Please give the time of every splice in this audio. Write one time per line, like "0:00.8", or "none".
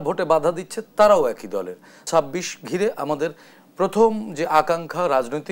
0:02.0